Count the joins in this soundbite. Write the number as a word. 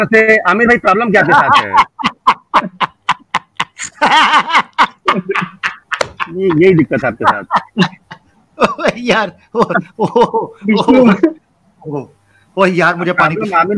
zero